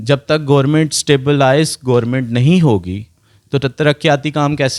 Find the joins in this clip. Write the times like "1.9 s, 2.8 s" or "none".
none